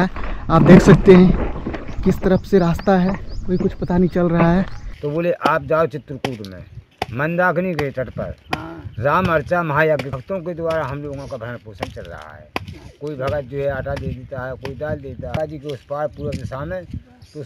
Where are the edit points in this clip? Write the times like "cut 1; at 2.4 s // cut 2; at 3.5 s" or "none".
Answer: cut 1; at 4.9 s // cut 2; at 10.1 s // cut 3; at 15.4 s